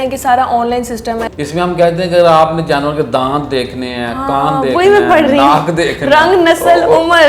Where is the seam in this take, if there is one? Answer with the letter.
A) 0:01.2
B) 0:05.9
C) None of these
A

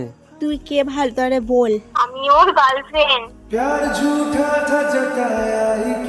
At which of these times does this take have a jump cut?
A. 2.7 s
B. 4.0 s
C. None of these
C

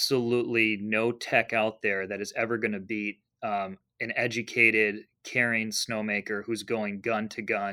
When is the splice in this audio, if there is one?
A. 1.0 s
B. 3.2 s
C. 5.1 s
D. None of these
D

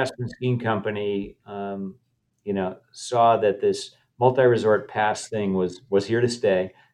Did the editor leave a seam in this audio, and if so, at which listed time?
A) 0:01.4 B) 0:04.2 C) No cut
C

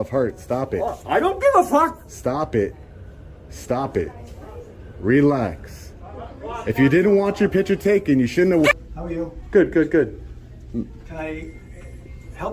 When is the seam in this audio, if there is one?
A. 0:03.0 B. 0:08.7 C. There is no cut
B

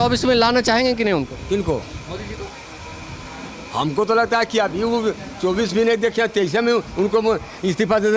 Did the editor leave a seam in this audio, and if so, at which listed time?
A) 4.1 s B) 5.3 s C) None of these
C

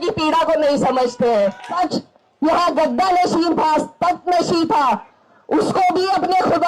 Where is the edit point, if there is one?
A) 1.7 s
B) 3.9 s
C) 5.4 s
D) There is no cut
A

